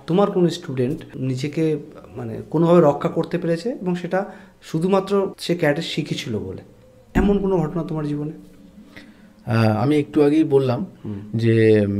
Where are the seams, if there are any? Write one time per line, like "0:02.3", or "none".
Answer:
0:01.1
0:05.4